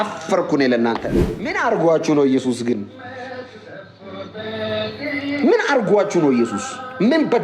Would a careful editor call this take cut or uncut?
cut